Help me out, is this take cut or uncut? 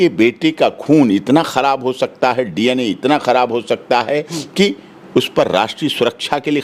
uncut